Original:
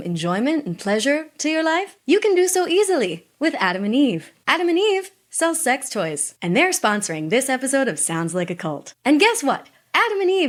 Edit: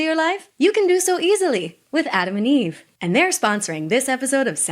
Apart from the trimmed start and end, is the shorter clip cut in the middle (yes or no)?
yes